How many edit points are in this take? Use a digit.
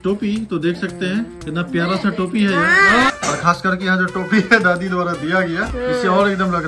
2